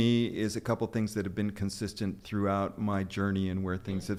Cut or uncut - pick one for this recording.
uncut